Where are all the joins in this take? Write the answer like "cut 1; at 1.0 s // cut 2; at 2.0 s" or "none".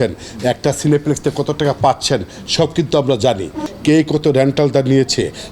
cut 1; at 3.6 s